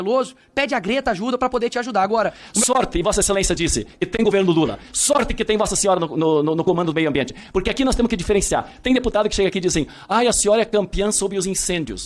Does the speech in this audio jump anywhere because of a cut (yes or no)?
yes